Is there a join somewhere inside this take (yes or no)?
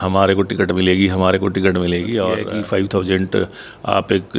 yes